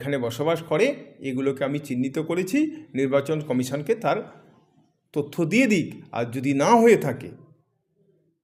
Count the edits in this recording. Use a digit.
0